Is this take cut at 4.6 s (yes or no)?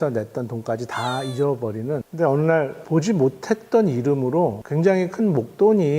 yes